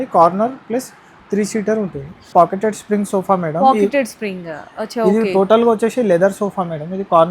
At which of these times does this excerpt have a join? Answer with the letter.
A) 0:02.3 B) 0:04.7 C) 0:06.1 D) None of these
A